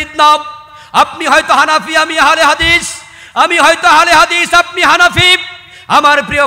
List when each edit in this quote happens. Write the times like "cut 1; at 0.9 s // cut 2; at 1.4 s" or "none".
none